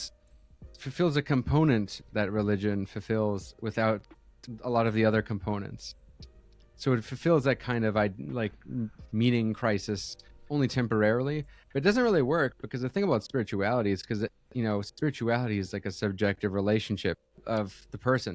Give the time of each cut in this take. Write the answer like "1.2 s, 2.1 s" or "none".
17.3 s